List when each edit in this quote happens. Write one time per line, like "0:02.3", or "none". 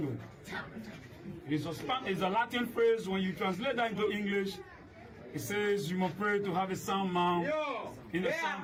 none